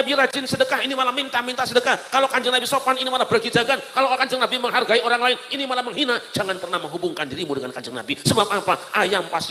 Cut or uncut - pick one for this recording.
uncut